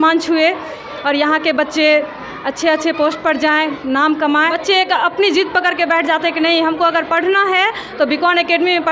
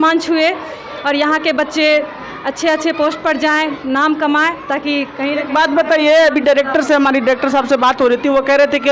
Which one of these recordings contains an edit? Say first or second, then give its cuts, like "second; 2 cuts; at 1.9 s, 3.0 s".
first; 1 cut; at 4.6 s